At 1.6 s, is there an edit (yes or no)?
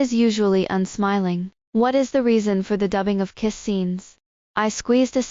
no